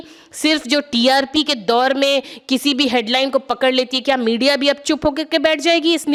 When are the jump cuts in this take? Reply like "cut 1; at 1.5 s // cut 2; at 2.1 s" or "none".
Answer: none